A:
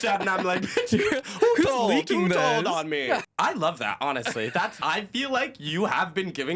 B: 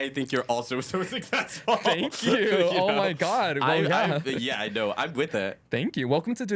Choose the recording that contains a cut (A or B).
A